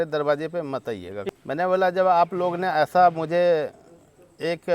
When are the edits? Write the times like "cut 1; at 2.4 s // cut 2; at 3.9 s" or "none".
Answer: cut 1; at 1.2 s